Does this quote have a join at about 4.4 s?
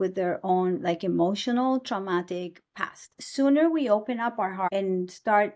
no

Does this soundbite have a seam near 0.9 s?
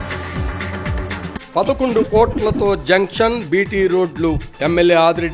yes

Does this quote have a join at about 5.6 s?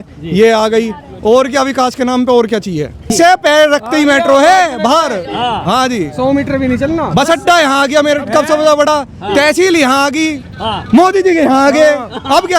no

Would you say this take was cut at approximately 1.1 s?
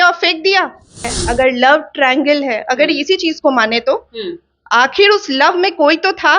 yes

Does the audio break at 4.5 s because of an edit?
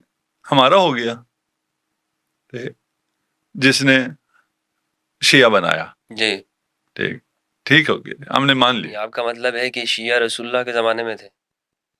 no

